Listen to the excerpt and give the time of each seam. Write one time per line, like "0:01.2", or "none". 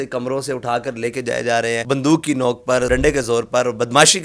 0:01.8
0:02.9